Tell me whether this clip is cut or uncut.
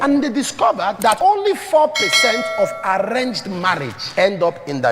cut